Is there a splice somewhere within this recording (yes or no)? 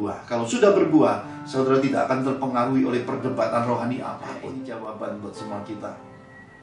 yes